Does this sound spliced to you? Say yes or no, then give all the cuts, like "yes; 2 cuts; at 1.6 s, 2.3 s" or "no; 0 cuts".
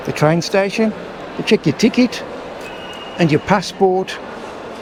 no; 0 cuts